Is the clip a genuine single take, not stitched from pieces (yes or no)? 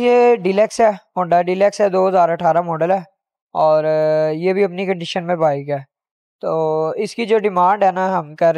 yes